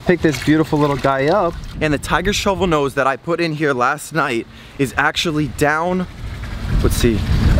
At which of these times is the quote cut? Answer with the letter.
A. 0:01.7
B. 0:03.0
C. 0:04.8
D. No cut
A